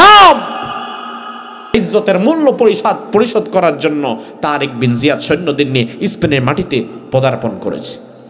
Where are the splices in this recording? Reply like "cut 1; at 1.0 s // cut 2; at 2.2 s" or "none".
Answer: cut 1; at 1.7 s

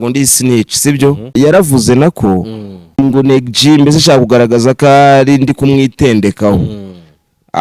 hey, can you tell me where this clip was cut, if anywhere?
cut 1; at 1.3 s // cut 2; at 3.0 s

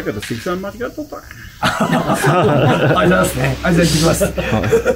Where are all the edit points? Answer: none

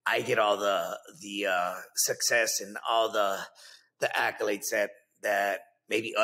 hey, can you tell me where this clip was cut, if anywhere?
none

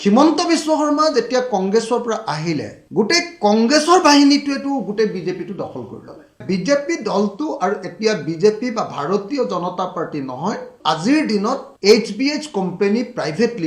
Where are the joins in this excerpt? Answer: cut 1; at 6.4 s // cut 2; at 10.7 s

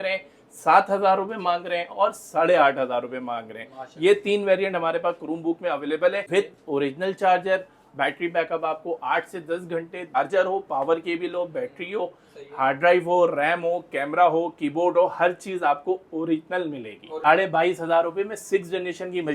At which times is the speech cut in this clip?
cut 1; at 6.2 s // cut 2; at 10.1 s // cut 3; at 17.2 s

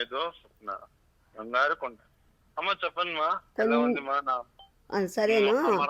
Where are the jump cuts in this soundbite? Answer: none

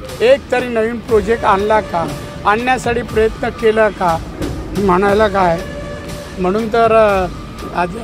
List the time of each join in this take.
cut 1; at 4.3 s

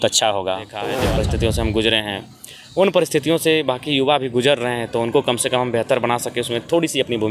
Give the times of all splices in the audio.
cut 1; at 1.0 s

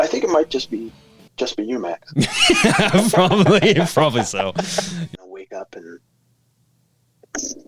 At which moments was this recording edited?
cut 1; at 5.1 s

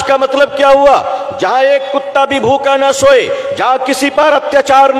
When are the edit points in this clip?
none

